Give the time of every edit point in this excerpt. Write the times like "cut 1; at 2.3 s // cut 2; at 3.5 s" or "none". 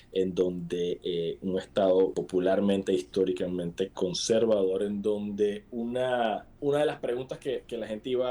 cut 1; at 2.1 s // cut 2; at 6.5 s